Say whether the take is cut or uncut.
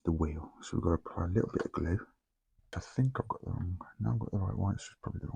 cut